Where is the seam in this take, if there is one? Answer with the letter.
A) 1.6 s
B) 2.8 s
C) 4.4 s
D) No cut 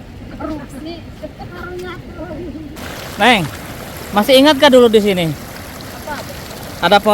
B